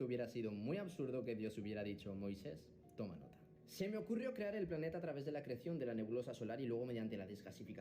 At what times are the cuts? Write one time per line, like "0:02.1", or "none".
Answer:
0:04.6

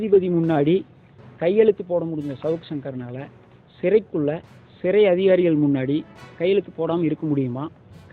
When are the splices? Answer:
none

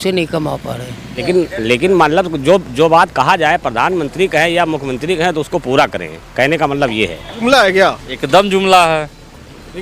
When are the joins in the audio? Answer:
0:01.2
0:07.4

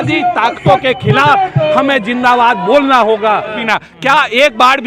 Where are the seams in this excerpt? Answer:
0:03.7

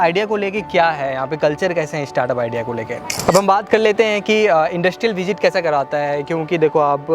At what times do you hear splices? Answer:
0:03.1

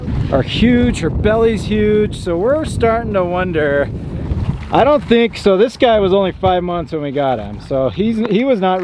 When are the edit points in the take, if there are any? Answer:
none

